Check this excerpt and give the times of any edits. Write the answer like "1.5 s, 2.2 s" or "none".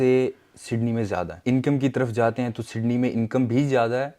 1.3 s